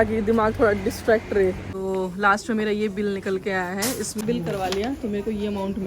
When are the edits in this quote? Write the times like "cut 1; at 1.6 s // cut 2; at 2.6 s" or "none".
cut 1; at 1.7 s // cut 2; at 4.2 s